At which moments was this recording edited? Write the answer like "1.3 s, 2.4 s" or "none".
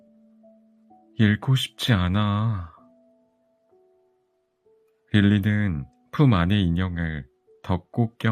0.9 s